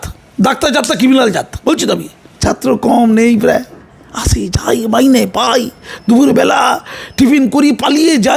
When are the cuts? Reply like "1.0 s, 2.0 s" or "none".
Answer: 2.3 s